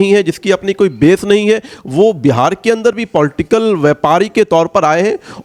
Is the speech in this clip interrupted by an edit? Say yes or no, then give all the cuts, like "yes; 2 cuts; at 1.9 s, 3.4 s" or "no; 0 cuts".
no; 0 cuts